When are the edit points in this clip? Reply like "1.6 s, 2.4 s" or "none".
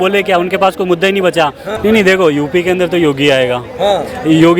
1.7 s